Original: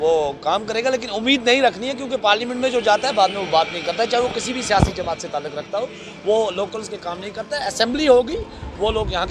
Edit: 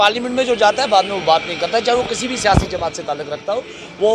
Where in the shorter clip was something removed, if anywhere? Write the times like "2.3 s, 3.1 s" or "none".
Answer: none